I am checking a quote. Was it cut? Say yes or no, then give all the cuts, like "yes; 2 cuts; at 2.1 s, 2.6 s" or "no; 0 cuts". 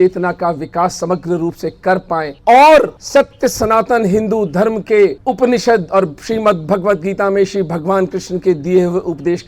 yes; 3 cuts; at 2.3 s, 3.0 s, 5.2 s